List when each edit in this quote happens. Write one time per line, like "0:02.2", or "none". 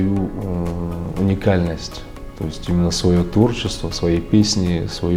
none